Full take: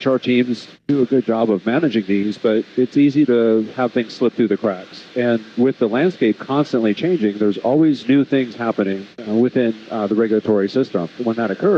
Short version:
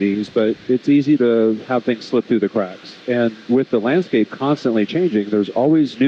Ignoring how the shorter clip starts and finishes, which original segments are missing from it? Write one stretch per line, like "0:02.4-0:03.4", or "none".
none